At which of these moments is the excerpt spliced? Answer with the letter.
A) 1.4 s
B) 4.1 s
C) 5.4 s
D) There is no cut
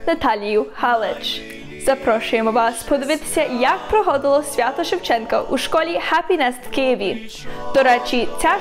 A